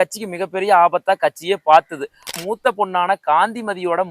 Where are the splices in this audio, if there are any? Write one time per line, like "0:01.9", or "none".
0:02.3